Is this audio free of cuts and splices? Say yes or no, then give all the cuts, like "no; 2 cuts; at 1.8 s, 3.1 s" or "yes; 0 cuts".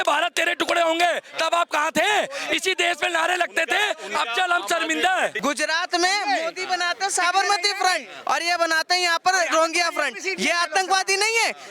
no; 1 cut; at 5.4 s